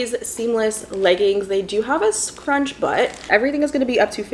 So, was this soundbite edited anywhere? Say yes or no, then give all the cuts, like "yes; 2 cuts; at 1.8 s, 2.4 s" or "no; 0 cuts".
yes; 1 cut; at 3.3 s